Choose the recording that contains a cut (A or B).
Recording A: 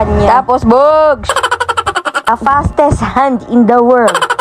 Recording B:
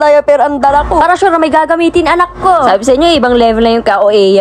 A